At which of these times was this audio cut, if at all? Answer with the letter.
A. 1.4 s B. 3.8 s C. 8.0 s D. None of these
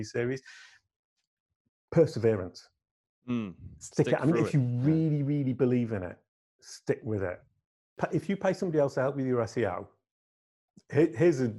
C